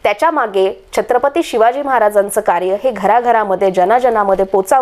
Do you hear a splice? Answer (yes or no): no